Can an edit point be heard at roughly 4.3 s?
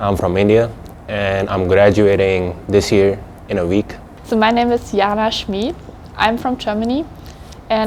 yes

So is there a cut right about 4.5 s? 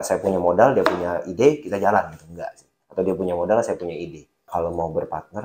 yes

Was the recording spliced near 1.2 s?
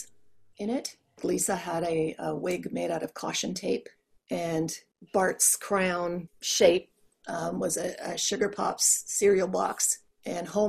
yes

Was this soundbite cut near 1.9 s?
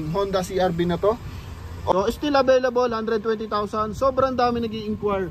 yes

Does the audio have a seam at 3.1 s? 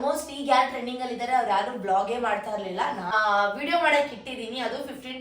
yes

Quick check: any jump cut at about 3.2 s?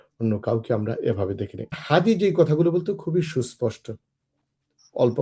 no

